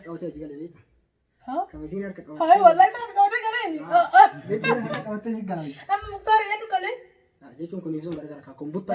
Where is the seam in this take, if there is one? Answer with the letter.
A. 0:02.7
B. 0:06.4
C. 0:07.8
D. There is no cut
D